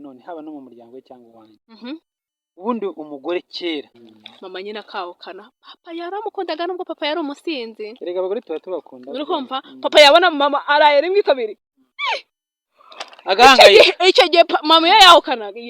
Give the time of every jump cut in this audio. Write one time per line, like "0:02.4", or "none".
0:04.0